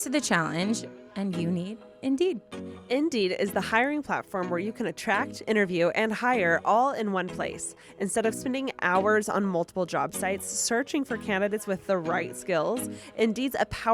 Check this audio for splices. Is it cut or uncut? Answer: uncut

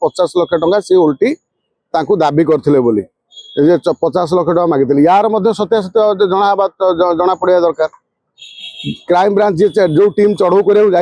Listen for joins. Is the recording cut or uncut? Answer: uncut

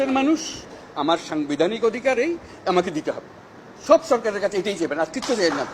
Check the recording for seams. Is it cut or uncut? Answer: uncut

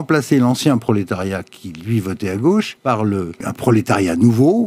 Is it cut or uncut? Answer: cut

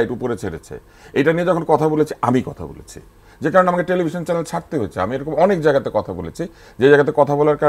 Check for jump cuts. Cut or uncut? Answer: uncut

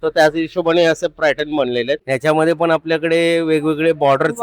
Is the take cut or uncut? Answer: cut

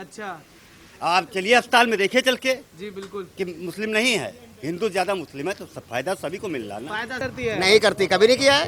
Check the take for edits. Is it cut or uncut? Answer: cut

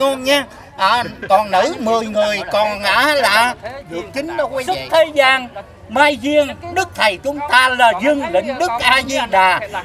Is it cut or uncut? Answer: cut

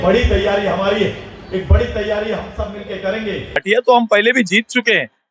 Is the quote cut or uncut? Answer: cut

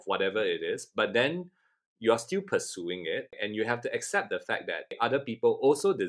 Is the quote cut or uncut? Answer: cut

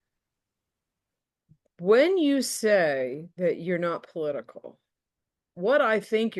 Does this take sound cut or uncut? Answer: uncut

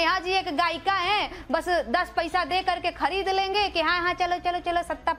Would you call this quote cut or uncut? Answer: uncut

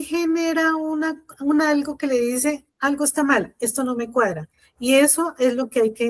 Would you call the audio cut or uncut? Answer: uncut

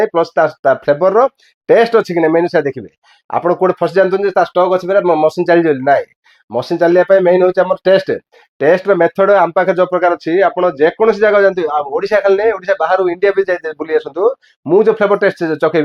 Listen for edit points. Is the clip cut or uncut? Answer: uncut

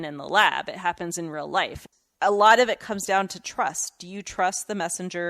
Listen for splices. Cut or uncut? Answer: cut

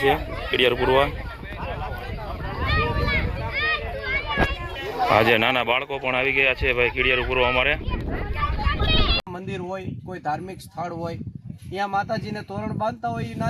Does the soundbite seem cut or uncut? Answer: cut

